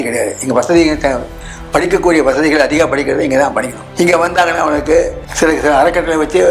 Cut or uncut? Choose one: cut